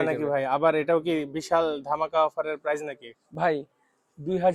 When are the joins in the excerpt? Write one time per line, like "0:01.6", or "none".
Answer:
none